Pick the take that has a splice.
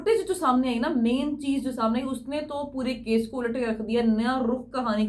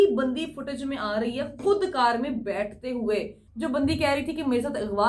second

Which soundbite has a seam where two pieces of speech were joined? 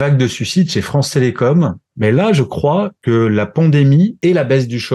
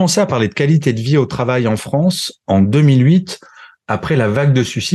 first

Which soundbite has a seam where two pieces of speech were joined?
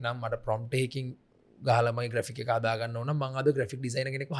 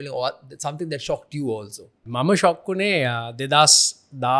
second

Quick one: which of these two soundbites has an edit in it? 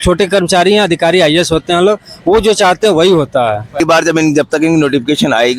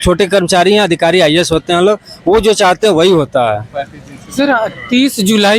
first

